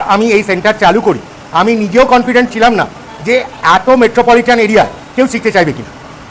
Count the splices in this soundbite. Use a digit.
0